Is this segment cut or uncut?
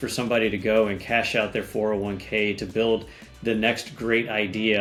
uncut